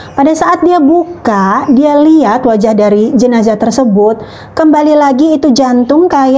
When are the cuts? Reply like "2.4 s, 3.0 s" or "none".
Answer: none